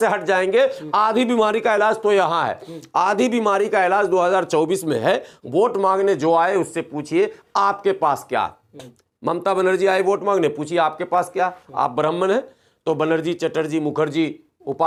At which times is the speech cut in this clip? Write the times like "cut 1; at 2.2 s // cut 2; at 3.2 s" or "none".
none